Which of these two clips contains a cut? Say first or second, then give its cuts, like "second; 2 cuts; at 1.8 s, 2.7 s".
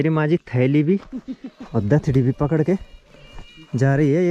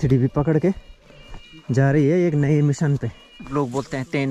second; 1 cut; at 3.4 s